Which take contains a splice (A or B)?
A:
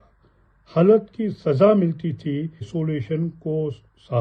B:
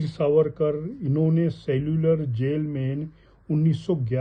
A